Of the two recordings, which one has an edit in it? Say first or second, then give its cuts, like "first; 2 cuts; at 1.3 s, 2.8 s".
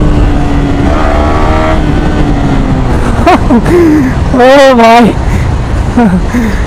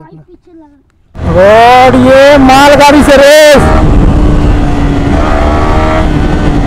second; 1 cut; at 1.2 s